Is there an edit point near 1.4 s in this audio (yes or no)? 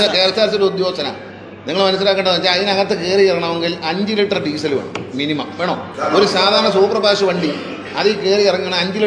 no